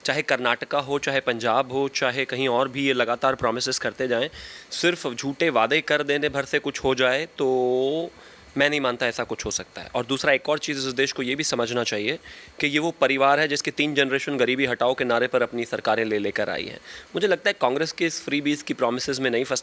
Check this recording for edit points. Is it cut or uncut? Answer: uncut